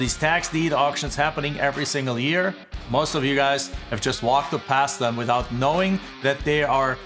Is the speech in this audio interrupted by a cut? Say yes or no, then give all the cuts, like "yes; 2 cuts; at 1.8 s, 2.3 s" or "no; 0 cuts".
yes; 1 cut; at 2.7 s